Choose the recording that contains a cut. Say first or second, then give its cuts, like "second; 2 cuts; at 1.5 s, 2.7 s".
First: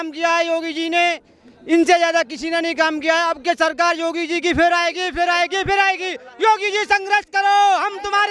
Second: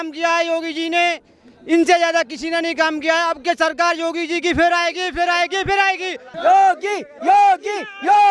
second; 1 cut; at 6.2 s